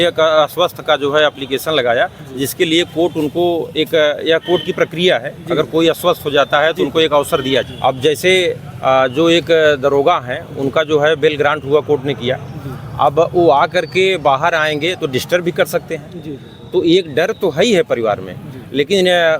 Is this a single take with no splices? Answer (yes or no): no